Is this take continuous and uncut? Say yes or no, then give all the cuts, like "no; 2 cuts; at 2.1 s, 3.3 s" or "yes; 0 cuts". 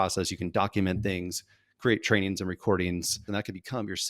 no; 1 cut; at 3.2 s